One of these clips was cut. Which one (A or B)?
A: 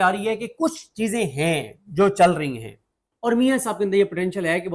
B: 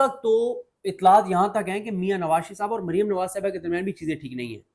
A